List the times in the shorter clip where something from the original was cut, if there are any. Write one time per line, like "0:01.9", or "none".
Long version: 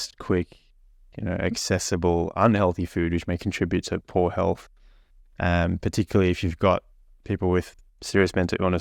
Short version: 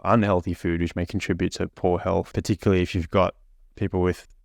0:02.4

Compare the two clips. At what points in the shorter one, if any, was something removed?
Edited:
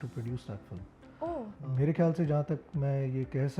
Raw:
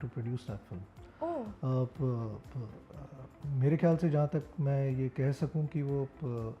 0:01.6

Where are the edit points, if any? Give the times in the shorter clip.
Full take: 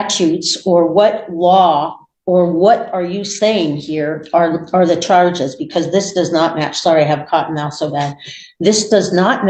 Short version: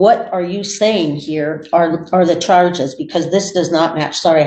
none

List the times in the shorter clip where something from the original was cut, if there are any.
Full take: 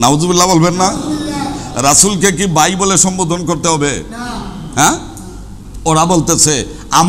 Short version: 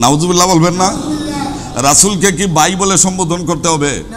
none

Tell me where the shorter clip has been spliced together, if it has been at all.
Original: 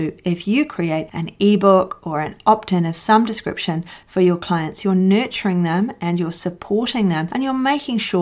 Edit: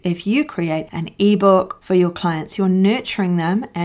0:01.8

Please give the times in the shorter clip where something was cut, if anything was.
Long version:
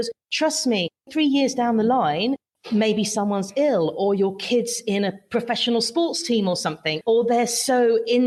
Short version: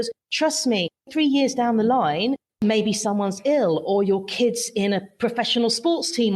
0:02.5

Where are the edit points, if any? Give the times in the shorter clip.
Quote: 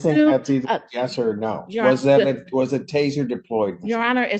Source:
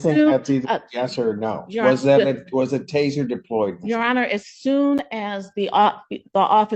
none

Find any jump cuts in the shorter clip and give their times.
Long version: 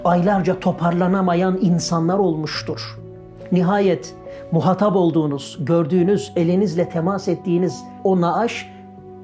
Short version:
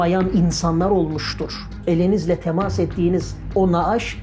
0:01.8

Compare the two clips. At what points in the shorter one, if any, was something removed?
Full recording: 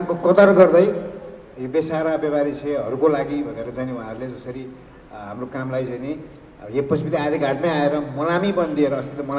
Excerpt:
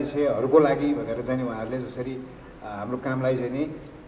none

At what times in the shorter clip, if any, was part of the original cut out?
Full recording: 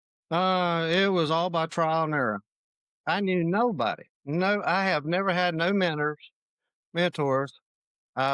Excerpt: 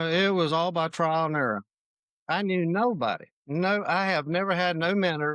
none

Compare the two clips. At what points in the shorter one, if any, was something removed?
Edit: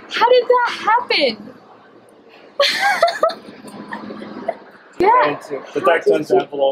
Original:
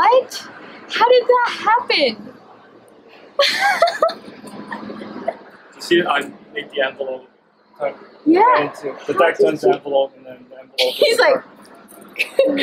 0:05.0

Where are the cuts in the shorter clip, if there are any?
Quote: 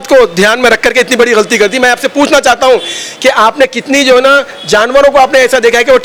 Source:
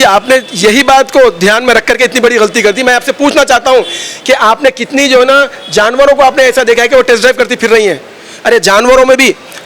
none

